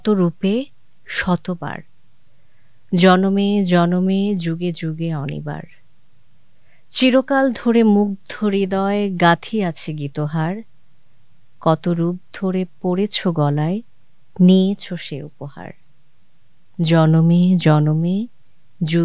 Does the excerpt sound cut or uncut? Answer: uncut